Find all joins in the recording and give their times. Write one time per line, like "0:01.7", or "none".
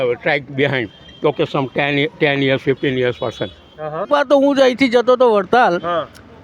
0:04.1